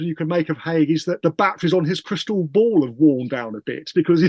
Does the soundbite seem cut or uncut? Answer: cut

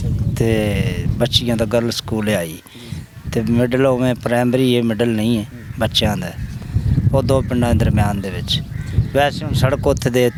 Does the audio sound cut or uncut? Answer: uncut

